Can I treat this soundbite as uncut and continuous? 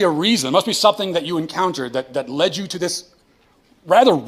yes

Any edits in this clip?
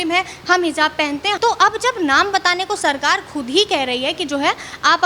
yes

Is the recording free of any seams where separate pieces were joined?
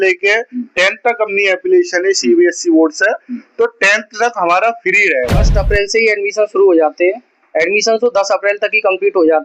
no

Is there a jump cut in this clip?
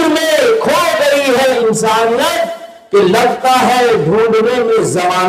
yes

